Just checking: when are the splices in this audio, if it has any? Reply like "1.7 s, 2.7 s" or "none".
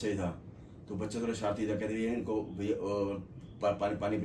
none